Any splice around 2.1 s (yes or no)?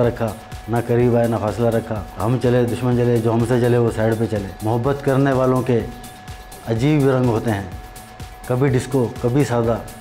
yes